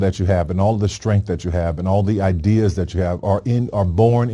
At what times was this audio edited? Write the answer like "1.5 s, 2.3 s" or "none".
none